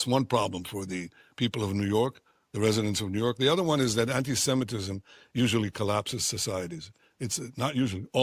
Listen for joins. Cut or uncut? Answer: uncut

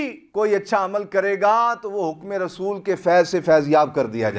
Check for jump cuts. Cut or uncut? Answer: uncut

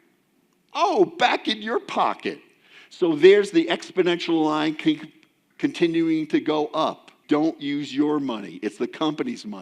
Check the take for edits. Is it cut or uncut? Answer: cut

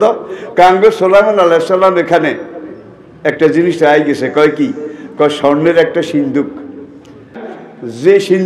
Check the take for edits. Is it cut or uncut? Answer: cut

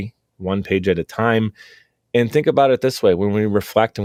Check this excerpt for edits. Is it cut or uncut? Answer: uncut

